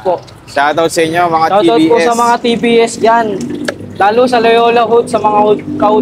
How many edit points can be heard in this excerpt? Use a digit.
0